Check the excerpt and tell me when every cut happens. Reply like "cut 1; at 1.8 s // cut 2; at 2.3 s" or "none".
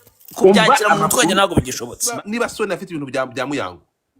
cut 1; at 2.0 s